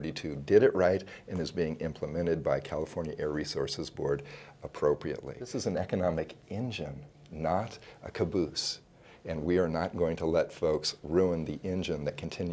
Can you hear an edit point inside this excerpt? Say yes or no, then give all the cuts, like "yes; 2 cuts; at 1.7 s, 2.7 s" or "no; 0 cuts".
yes; 1 cut; at 5.4 s